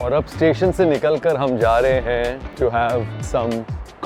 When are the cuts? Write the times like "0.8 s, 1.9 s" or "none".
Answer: 2.4 s, 3.2 s